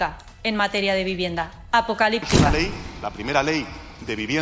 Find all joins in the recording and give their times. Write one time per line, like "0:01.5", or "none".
0:02.5